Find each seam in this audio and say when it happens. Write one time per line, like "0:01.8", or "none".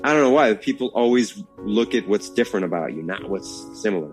none

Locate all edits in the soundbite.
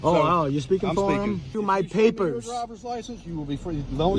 0:01.5

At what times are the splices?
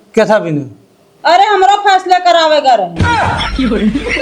0:03.0

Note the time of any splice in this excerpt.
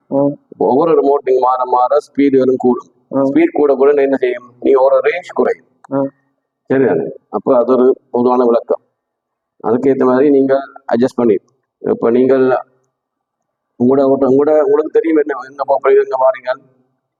none

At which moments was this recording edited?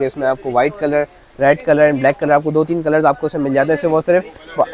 none

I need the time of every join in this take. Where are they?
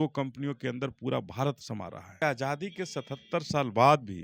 0:02.2

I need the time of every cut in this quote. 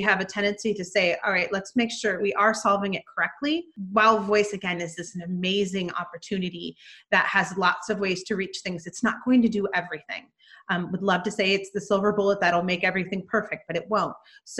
0:02.2
0:03.8

